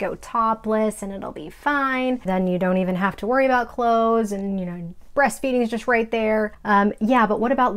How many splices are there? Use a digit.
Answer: 2